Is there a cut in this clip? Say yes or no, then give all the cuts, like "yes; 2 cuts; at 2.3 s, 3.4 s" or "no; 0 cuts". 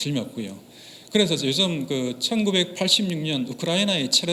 no; 0 cuts